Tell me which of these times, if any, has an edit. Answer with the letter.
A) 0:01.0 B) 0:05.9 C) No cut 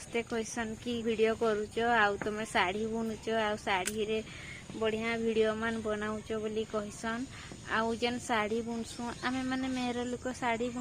A